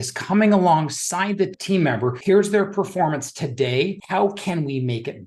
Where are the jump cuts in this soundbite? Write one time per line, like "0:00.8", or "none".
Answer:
none